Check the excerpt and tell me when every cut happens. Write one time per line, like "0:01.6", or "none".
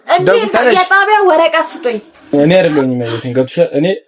0:02.3

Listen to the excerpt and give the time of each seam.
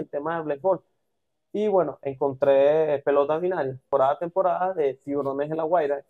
0:03.9

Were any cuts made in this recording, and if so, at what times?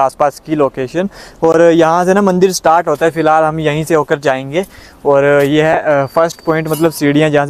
none

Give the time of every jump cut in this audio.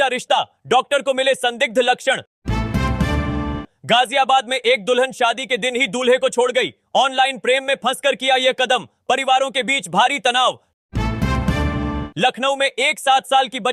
0:10.8
0:12.1

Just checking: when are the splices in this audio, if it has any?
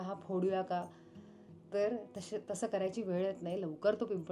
none

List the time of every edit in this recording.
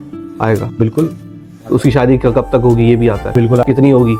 none

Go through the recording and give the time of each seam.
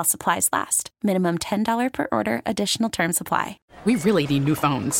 0:03.6

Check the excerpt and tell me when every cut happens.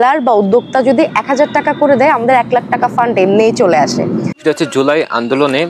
0:04.3

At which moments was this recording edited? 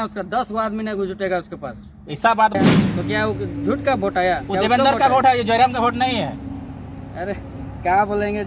0:02.5

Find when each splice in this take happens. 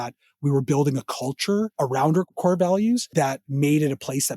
0:01.7
0:03.1

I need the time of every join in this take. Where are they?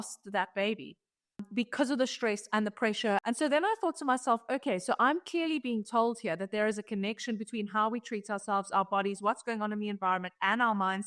0:01.4
0:03.2

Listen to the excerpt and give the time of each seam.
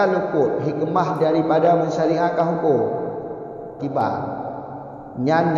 0:03.7

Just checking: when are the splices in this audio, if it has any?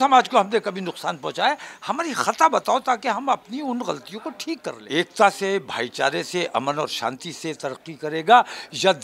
0:04.7

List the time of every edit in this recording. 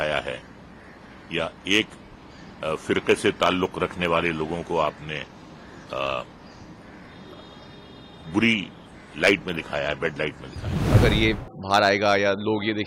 0:10.7

